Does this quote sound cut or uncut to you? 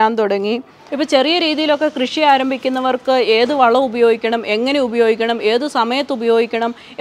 cut